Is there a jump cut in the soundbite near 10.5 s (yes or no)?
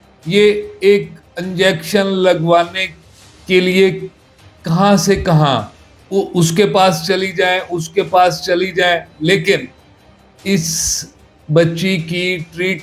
no